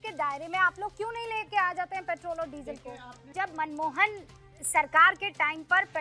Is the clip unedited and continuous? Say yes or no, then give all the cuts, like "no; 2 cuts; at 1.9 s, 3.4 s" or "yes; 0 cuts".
no; 1 cut; at 3.3 s